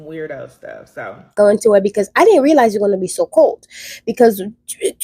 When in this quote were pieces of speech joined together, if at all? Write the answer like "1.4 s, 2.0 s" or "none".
1.3 s